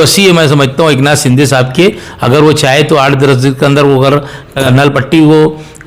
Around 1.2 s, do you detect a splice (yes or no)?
no